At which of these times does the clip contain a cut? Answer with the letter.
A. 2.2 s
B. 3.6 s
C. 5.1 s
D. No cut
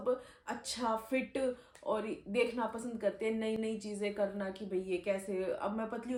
D